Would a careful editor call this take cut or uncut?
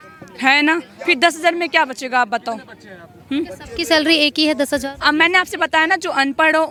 uncut